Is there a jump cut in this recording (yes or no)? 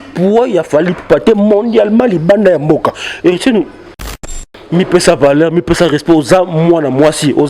yes